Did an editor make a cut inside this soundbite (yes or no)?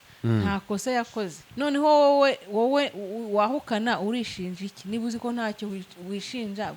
yes